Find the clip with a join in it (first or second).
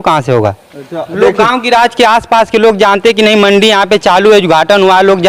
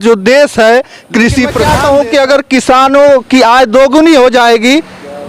second